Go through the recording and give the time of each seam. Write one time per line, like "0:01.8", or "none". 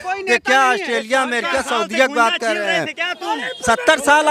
none